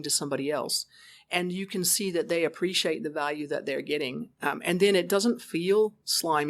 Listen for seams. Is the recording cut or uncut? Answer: uncut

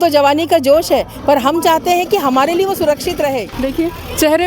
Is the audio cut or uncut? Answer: cut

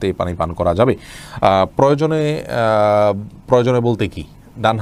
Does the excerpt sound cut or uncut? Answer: uncut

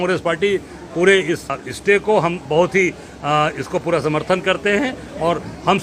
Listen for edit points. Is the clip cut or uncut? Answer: cut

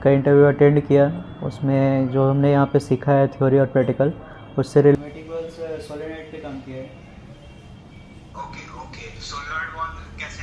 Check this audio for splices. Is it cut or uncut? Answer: cut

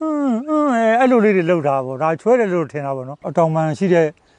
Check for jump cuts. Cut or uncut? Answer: cut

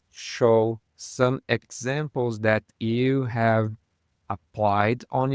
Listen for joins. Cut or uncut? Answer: uncut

